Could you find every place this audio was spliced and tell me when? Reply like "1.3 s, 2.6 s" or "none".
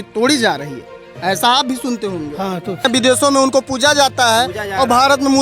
2.9 s